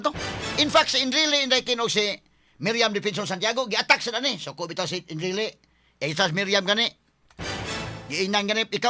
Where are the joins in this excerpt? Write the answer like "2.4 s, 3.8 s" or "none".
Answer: none